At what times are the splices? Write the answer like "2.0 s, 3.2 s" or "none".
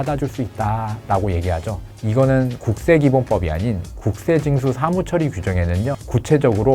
none